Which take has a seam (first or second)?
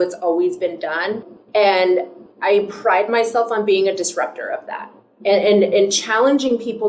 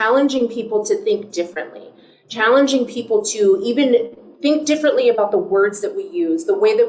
first